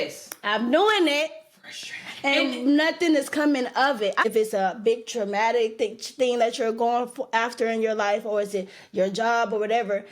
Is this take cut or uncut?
cut